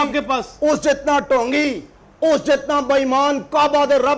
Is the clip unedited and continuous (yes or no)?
yes